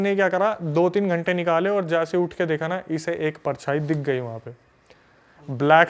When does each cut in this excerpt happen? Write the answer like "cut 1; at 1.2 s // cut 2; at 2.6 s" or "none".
none